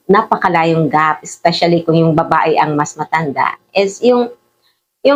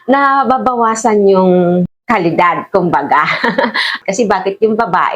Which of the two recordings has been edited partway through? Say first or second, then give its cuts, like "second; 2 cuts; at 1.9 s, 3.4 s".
second; 2 cuts; at 2.0 s, 4.0 s